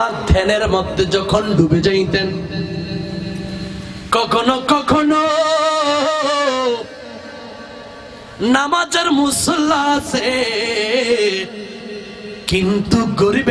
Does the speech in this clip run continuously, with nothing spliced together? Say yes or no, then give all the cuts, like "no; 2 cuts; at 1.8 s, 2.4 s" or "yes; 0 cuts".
yes; 0 cuts